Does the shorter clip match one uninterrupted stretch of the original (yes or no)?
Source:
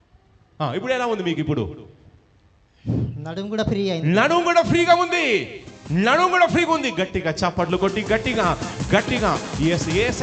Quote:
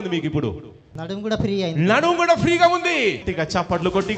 no